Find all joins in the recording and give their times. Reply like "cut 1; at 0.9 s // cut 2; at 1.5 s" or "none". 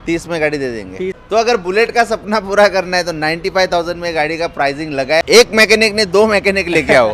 cut 1; at 1.2 s // cut 2; at 5.2 s